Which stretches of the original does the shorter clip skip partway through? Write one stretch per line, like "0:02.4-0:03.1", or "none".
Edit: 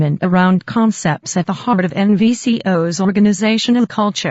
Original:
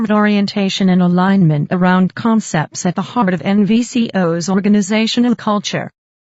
none

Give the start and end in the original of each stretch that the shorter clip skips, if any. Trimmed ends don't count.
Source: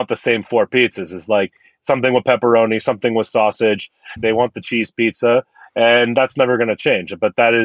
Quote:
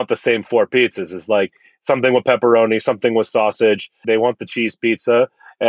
0:03.9-0:04.1

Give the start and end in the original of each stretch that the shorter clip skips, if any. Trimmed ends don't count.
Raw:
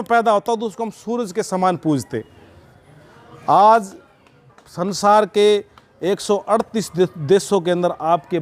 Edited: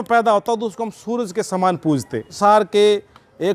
0:02.3-0:04.9

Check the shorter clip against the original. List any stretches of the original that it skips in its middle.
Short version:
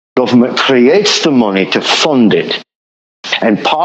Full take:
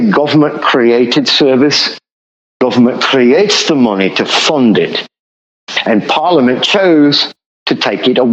none

